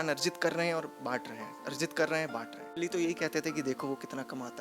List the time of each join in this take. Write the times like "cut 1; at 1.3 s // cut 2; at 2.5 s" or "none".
cut 1; at 2.7 s

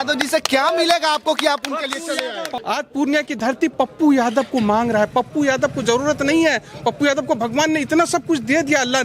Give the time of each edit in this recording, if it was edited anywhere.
cut 1; at 2.5 s

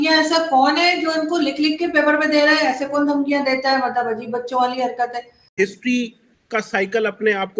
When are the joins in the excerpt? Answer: cut 1; at 5.5 s

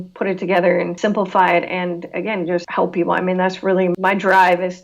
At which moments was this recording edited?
cut 1; at 1.0 s // cut 2; at 2.7 s // cut 3; at 3.9 s

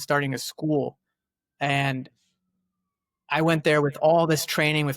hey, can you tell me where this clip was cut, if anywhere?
none

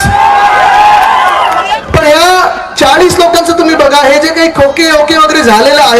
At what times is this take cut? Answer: cut 1; at 1.8 s

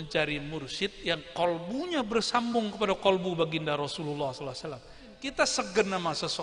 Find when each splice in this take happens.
cut 1; at 5.2 s

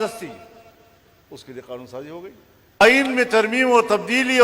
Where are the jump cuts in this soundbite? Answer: cut 1; at 2.8 s

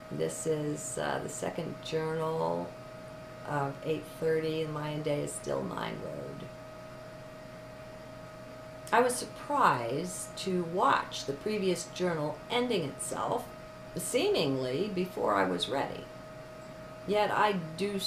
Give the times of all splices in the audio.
none

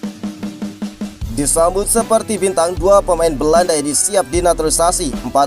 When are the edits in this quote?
cut 1; at 1.3 s

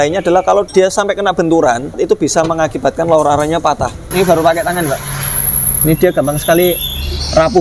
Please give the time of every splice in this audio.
cut 1; at 2.0 s // cut 2; at 4.1 s

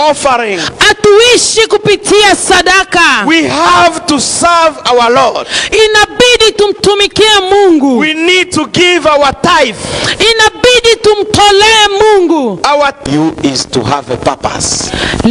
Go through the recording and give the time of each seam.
cut 1; at 13.0 s

